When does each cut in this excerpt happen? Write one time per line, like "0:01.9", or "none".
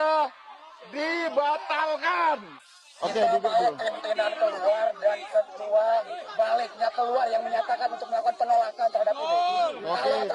none